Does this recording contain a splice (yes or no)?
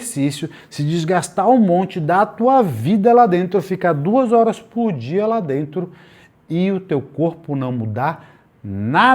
no